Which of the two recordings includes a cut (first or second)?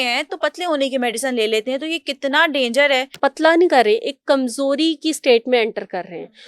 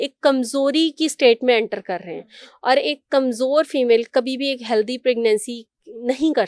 first